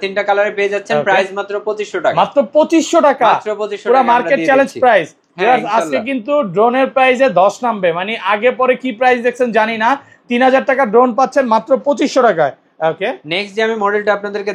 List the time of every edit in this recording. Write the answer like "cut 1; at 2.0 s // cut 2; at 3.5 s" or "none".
none